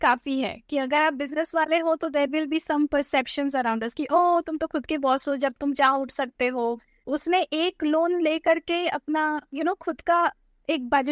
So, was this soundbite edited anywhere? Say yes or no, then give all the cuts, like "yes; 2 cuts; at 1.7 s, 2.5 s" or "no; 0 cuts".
yes; 1 cut; at 6.9 s